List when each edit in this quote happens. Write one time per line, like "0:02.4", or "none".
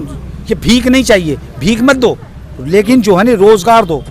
none